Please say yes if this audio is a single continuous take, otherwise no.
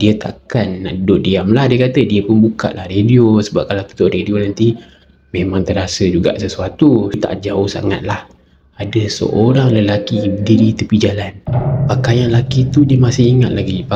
no